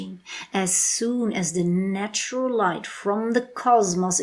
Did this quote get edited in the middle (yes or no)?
no